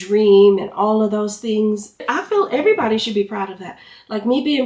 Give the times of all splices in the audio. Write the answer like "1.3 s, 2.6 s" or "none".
2.1 s